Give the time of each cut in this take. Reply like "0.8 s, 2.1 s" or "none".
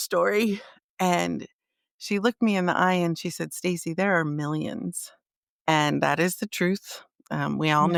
none